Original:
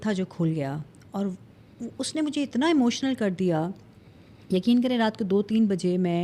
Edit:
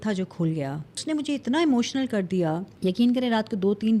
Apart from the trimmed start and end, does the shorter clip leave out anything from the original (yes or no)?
yes